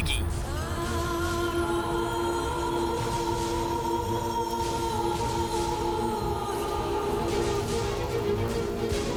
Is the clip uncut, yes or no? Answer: yes